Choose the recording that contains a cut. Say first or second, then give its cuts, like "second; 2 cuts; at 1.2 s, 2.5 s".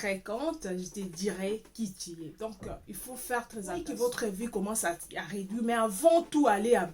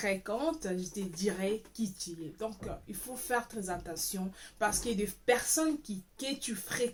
first; 1 cut; at 3.9 s